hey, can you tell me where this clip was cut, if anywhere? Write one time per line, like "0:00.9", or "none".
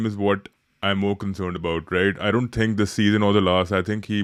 none